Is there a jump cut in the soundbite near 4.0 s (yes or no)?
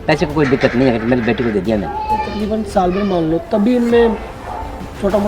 no